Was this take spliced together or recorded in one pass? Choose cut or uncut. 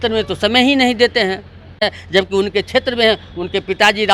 uncut